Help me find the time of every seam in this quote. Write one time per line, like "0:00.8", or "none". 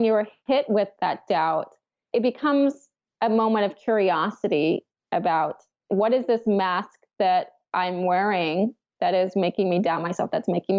none